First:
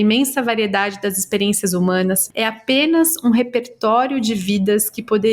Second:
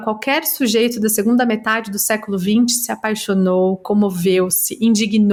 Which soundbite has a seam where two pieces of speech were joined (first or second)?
first